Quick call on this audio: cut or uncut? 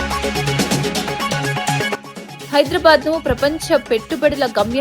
cut